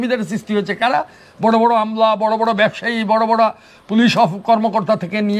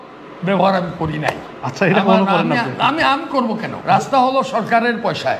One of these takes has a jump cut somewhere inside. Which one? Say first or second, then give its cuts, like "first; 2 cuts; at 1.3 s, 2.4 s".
second; 1 cut; at 3.7 s